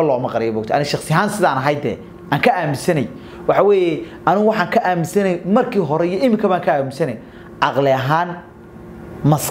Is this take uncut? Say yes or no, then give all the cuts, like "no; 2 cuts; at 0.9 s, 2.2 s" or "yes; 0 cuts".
yes; 0 cuts